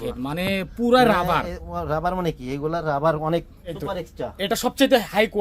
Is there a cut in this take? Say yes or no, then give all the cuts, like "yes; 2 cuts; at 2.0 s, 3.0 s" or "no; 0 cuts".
yes; 1 cut; at 3.8 s